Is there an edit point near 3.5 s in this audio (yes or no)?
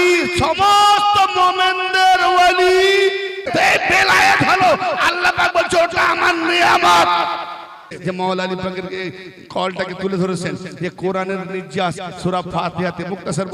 yes